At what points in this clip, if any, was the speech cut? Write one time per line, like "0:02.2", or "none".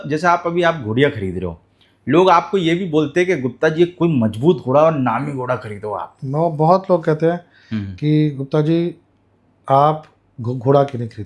none